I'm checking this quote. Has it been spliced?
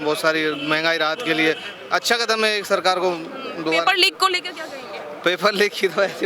no; 0 cuts

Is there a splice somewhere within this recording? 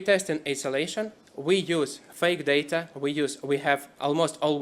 no; 0 cuts

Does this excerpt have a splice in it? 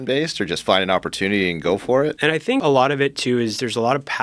yes; 1 cut; at 2.3 s

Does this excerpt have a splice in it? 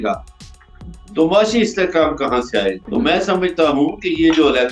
yes; 1 cut; at 2.8 s

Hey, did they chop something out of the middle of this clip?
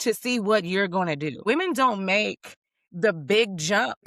yes; 1 cut; at 1.4 s

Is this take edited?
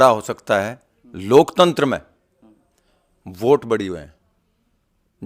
no; 0 cuts

